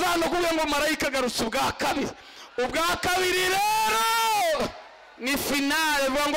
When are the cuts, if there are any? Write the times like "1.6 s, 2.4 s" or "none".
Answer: none